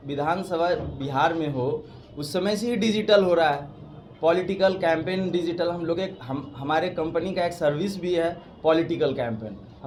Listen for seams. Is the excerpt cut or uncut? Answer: uncut